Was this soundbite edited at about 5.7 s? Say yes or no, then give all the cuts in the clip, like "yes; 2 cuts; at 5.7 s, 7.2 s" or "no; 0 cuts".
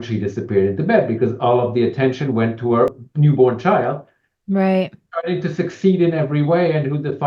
no; 1 cut; at 2.9 s